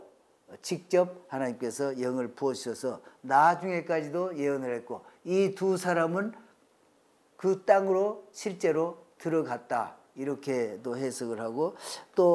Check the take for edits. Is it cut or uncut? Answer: uncut